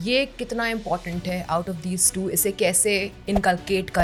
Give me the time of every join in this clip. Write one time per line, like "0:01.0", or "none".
none